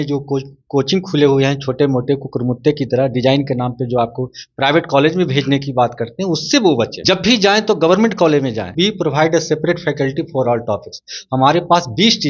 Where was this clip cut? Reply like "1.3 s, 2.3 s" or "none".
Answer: 7.0 s, 8.7 s

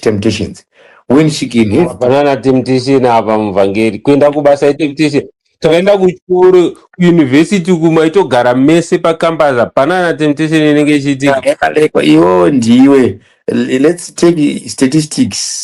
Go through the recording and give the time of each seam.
none

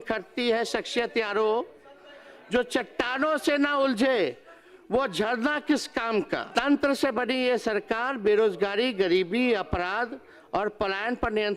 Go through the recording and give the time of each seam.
6.5 s

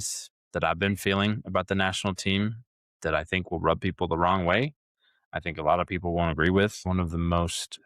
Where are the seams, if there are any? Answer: 6.8 s

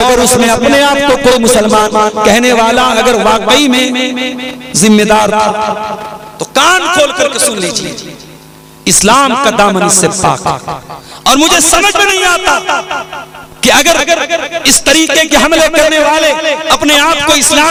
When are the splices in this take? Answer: none

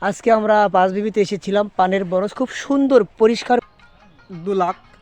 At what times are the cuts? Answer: 3.7 s

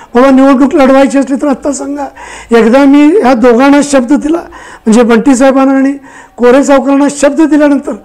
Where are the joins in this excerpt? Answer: none

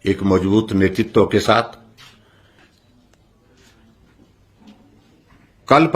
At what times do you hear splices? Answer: 2.6 s

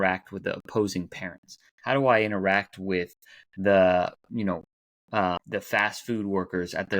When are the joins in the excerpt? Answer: 5.4 s

